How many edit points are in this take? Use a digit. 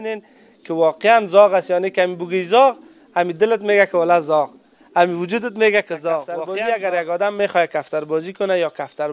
1